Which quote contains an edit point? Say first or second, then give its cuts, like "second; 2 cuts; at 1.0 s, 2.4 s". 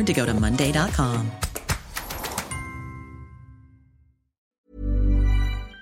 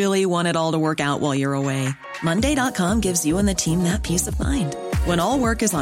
first; 1 cut; at 4.5 s